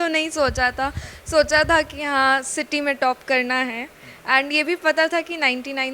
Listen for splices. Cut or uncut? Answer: uncut